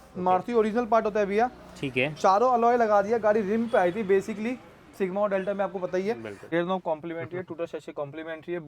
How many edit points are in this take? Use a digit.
1